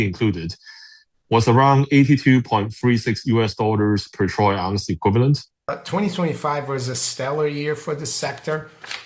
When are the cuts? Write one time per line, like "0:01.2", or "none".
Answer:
0:05.7